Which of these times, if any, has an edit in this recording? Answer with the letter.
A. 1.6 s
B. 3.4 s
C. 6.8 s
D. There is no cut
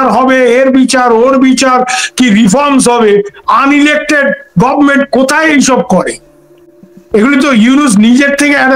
D